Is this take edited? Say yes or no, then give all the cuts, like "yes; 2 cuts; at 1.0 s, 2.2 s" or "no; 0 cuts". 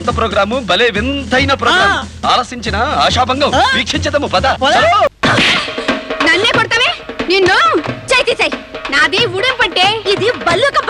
yes; 1 cut; at 5.1 s